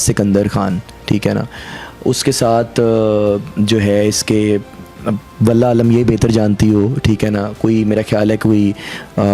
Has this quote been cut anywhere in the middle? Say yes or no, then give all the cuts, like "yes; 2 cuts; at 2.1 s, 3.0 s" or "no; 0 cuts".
no; 0 cuts